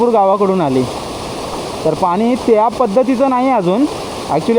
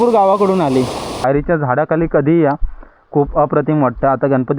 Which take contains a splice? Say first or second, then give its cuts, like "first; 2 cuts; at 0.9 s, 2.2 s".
second; 1 cut; at 1.2 s